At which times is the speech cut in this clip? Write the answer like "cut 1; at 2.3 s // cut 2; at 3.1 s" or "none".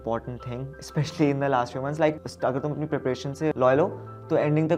cut 1; at 2.3 s // cut 2; at 3.5 s